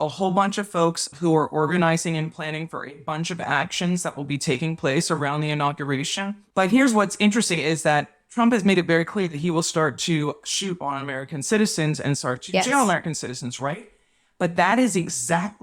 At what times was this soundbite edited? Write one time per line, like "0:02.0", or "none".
0:01.1
0:06.4